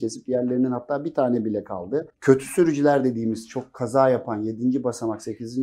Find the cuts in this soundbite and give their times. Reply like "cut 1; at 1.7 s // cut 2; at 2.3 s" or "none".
cut 1; at 2.1 s